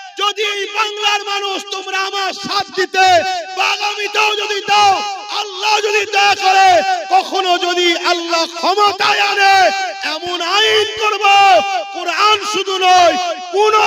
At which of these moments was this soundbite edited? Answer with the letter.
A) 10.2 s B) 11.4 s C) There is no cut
C